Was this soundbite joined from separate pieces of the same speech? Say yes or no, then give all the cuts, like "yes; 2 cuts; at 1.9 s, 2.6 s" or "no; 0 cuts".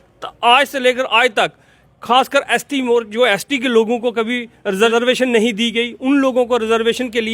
yes; 1 cut; at 4.9 s